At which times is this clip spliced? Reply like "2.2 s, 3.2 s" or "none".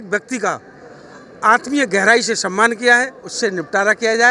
3.3 s

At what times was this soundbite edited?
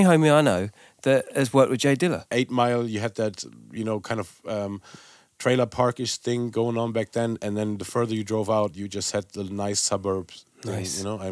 2.3 s

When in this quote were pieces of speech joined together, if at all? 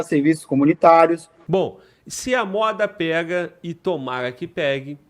1.3 s

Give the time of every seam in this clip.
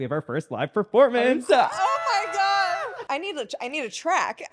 3.0 s

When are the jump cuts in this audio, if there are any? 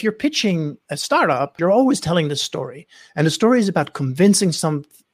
1.5 s

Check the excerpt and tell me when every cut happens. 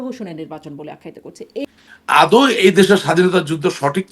1.6 s

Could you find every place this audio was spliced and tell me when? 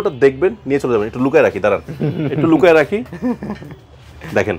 none

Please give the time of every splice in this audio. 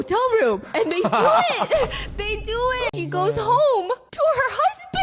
2.9 s

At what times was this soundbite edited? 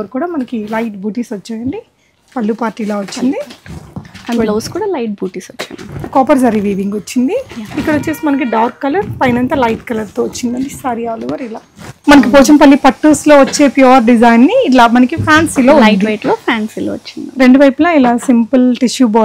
6.1 s, 11.9 s

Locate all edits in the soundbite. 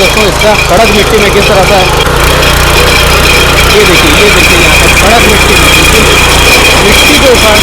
2.1 s

